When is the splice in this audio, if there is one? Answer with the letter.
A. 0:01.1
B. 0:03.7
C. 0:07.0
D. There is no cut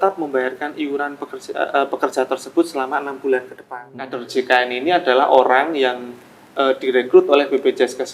B